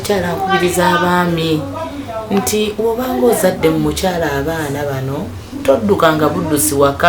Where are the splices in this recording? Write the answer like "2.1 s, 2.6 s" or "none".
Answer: none